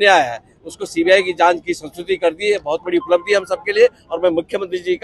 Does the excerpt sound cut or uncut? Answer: uncut